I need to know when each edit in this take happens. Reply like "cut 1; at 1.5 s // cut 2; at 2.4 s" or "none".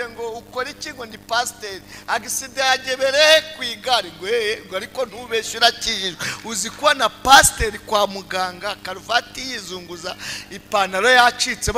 none